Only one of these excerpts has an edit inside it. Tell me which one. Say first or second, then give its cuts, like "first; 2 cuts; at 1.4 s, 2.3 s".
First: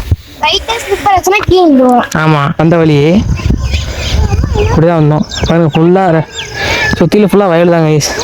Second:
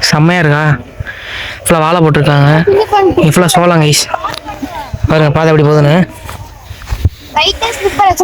first; 1 cut; at 2.6 s